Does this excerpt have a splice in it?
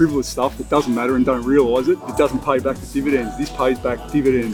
no; 0 cuts

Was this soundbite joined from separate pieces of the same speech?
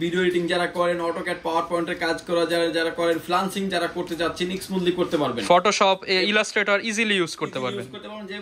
no; 0 cuts

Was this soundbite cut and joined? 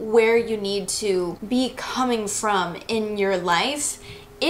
yes; 1 cut; at 1.4 s

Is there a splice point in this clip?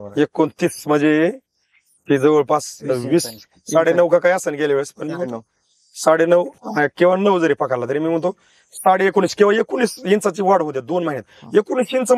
no; 0 cuts

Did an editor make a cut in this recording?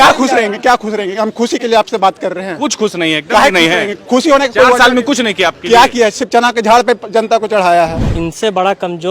yes; 1 cut; at 8.1 s

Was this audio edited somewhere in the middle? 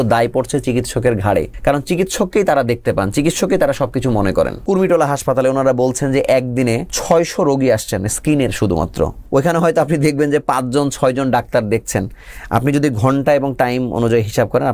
yes; 4 cuts; at 1.5 s, 4.6 s, 6.9 s, 9.2 s

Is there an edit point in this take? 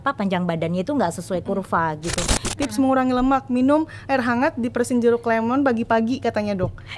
yes; 1 cut; at 2.5 s

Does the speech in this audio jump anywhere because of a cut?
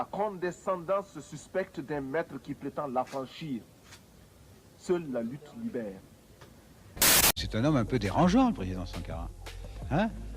yes; 1 cut; at 7.0 s

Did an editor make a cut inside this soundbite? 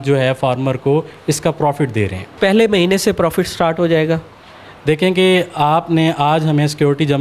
no; 0 cuts

